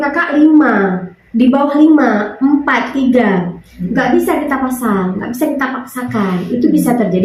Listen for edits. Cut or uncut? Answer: uncut